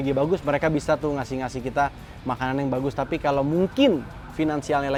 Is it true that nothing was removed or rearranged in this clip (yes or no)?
yes